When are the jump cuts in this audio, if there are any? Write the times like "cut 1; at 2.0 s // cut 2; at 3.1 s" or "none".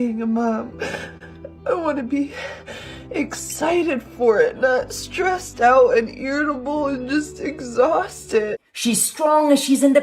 cut 1; at 1.1 s

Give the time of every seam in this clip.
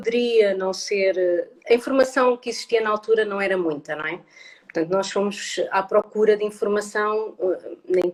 none

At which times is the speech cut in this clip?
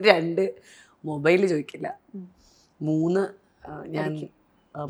none

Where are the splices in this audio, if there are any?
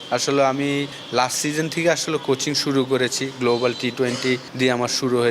cut 1; at 1.0 s // cut 2; at 4.5 s

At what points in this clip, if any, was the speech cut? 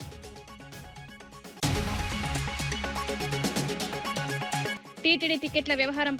cut 1; at 1.6 s // cut 2; at 3.1 s // cut 3; at 4.9 s

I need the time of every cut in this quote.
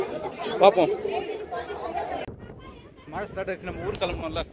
cut 1; at 2.4 s

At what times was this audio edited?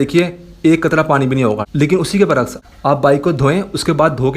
cut 1; at 1.7 s

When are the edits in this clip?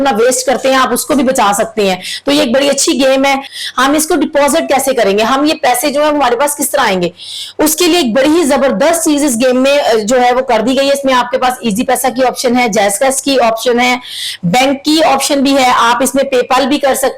cut 1; at 3.5 s

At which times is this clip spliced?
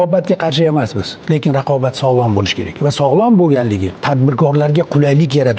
cut 1; at 3.9 s

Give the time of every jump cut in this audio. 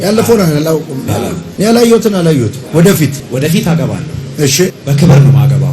cut 1; at 1.4 s // cut 2; at 2.6 s // cut 3; at 3.2 s // cut 4; at 4.8 s

